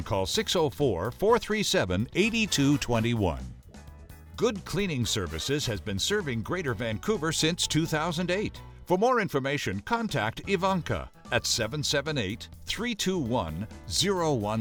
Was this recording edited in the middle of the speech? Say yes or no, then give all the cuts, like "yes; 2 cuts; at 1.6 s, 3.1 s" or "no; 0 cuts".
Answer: no; 0 cuts